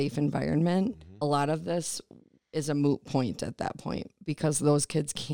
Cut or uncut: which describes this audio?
cut